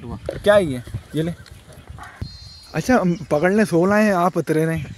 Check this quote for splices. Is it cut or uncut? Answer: cut